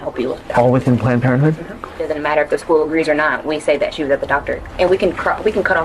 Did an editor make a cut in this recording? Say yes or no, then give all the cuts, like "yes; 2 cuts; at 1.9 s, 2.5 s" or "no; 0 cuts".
yes; 2 cuts; at 2.1 s, 4.7 s